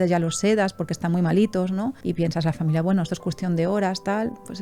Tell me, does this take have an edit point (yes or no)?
no